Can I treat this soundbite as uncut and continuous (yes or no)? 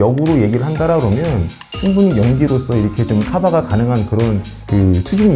yes